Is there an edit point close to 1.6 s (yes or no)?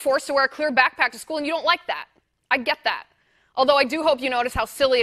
yes